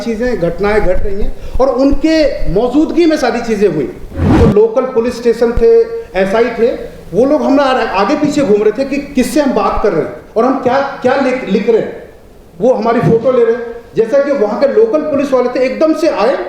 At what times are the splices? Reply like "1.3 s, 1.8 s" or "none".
4.3 s